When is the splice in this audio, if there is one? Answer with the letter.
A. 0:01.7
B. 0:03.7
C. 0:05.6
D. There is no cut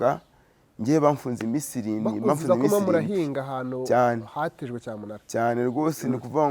D